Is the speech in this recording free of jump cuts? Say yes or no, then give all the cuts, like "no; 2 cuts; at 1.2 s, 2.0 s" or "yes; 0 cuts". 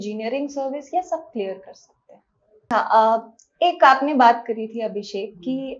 no; 1 cut; at 2.7 s